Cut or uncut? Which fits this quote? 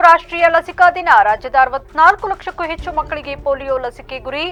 uncut